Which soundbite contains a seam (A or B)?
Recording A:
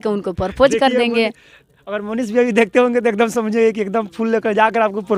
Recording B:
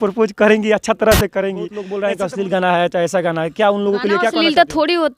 B